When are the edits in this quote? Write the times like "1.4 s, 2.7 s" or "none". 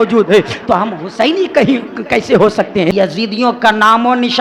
2.9 s